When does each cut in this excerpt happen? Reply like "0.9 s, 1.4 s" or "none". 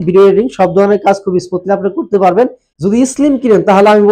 2.6 s

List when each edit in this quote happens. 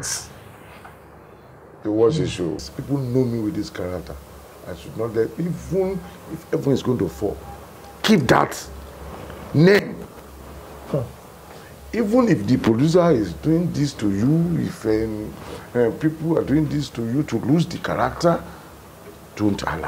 2.6 s

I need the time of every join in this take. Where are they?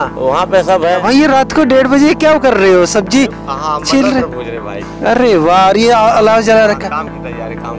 1.0 s

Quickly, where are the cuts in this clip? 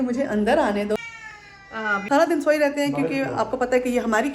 1.6 s

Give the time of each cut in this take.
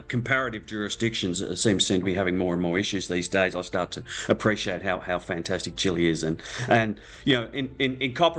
none

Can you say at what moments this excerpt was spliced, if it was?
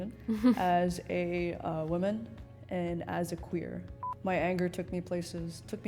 3.9 s

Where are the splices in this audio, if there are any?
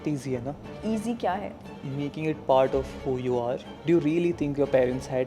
3.7 s

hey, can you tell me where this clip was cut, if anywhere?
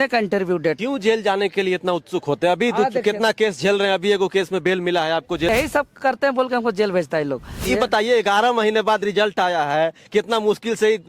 0.8 s, 5.5 s, 7.6 s

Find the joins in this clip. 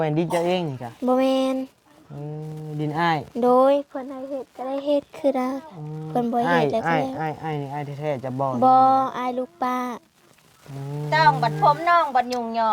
11.1 s

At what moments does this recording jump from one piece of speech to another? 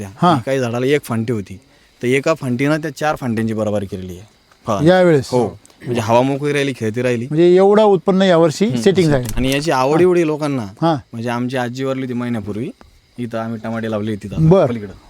9.3 s

